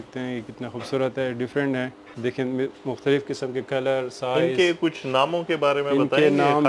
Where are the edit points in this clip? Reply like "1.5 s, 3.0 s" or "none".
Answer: none

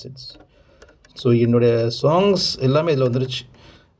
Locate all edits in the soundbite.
1.1 s

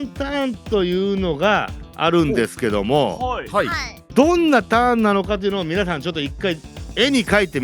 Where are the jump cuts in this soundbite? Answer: 4.1 s

